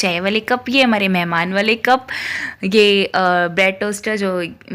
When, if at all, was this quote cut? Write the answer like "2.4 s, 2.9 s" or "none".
none